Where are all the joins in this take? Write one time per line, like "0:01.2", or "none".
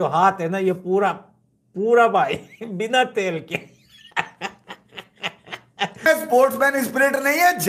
0:05.9